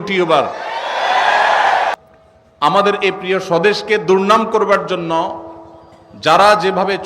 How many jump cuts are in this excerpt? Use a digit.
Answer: 1